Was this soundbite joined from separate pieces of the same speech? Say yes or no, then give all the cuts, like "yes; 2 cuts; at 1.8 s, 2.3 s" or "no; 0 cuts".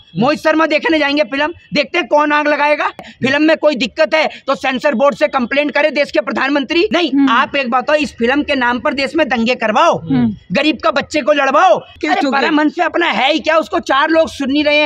yes; 3 cuts; at 3.1 s, 6.9 s, 11.9 s